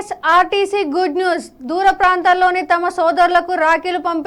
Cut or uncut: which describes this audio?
uncut